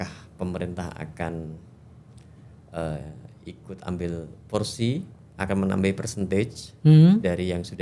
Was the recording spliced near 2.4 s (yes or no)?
no